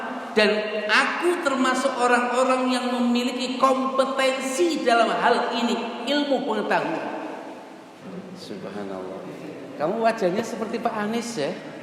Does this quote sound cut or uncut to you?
cut